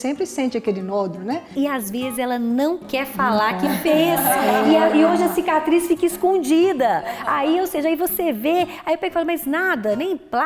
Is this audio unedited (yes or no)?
no